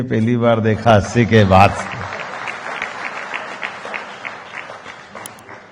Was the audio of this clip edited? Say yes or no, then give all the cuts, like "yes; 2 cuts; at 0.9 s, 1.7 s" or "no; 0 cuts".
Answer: no; 0 cuts